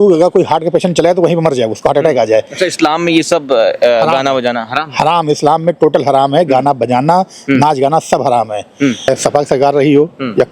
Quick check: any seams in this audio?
yes; 1 cut; at 9.1 s

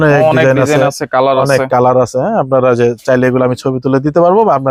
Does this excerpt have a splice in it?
no; 0 cuts

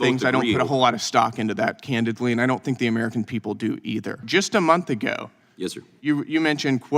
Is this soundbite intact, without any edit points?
no; 1 cut; at 4.2 s

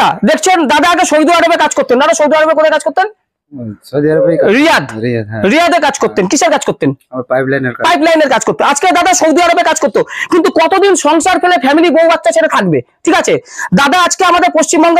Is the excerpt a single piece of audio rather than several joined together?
yes; 0 cuts

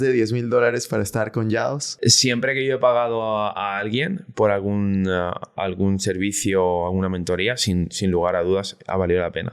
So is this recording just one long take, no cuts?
no; 1 cut; at 1.9 s

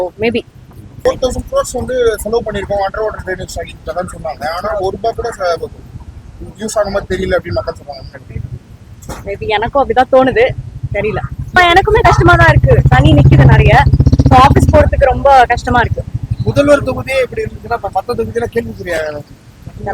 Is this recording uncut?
no; 2 cuts; at 1.0 s, 11.5 s

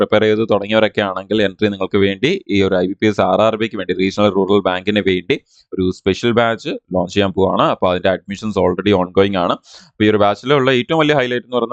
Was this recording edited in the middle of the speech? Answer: no; 0 cuts

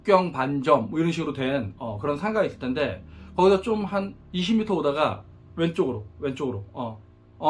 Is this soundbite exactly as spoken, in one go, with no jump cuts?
yes; 0 cuts

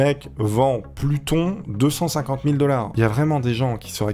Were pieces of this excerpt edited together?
no; 0 cuts

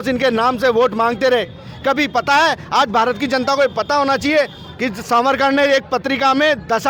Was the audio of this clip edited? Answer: no; 0 cuts

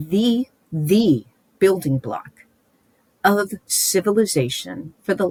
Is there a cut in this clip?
no; 0 cuts

